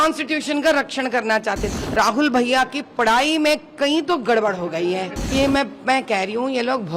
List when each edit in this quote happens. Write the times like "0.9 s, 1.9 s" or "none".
1.7 s, 5.3 s